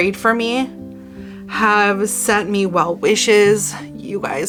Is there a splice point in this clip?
no; 0 cuts

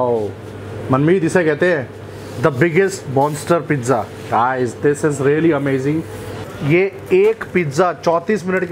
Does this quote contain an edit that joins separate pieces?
yes; 1 cut; at 6.5 s

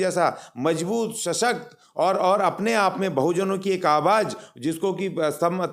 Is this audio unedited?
yes; 0 cuts

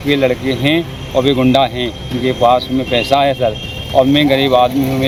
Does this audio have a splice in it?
no; 0 cuts

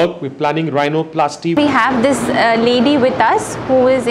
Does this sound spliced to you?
yes; 1 cut; at 1.6 s

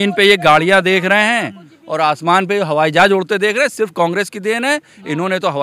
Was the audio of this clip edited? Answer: no; 0 cuts

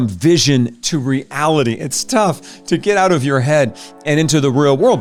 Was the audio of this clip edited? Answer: no; 0 cuts

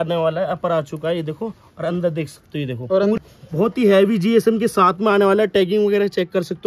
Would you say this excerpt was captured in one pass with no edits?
no; 1 cut; at 3.2 s

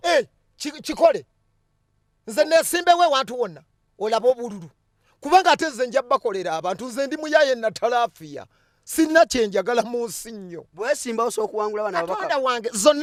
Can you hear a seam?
no; 0 cuts

